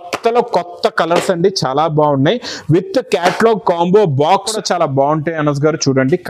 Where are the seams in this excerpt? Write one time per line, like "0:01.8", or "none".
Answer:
0:04.5